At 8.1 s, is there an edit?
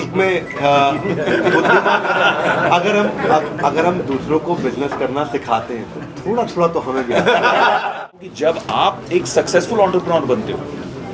yes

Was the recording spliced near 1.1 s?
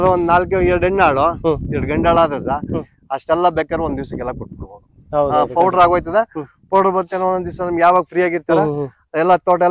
no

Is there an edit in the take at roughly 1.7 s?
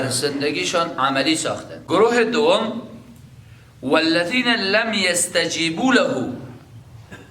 yes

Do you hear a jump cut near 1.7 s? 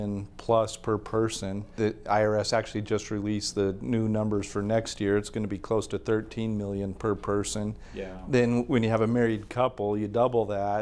yes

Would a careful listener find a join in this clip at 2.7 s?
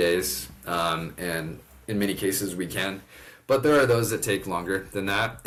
no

